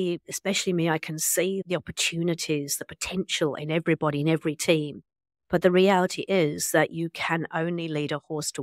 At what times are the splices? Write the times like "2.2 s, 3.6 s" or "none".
1.6 s